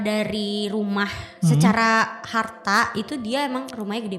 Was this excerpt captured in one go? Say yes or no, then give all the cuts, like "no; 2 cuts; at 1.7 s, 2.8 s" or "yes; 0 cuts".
yes; 0 cuts